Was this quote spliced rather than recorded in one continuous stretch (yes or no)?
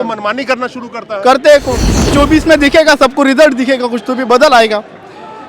yes